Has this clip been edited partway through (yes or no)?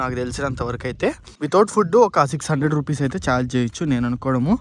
no